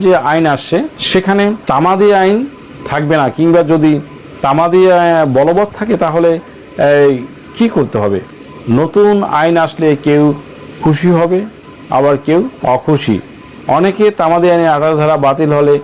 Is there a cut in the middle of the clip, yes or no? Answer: yes